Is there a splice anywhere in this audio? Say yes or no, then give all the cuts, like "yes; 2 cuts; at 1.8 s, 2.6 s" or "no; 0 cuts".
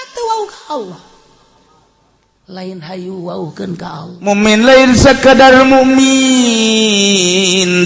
yes; 1 cut; at 4.1 s